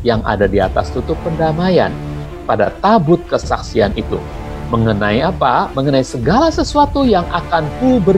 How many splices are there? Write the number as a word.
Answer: one